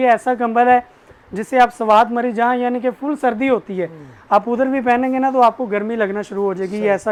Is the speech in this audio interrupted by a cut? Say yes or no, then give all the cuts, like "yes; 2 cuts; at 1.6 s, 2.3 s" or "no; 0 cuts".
no; 0 cuts